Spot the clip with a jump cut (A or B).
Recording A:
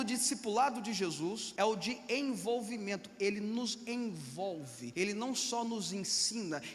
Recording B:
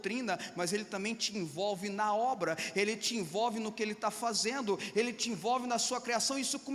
A